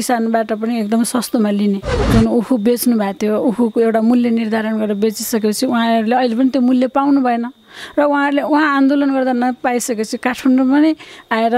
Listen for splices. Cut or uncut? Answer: cut